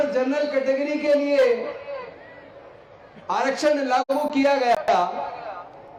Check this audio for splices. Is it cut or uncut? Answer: uncut